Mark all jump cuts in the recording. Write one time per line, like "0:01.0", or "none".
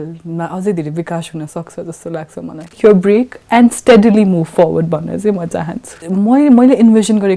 0:02.8
0:05.9